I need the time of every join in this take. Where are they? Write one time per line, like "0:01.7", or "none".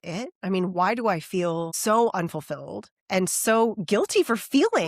none